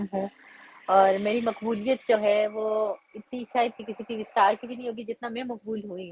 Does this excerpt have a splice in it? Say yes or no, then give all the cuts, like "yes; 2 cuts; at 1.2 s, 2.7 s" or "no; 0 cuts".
no; 0 cuts